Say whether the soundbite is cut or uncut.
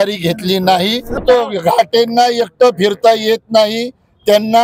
cut